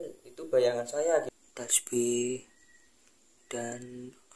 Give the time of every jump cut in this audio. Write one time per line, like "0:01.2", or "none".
0:01.3